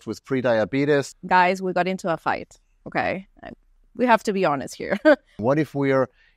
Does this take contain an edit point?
yes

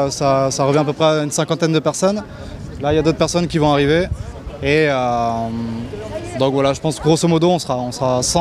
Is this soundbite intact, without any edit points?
yes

